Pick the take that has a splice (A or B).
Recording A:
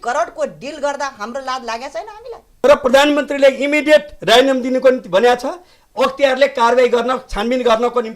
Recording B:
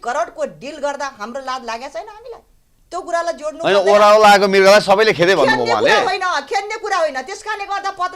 A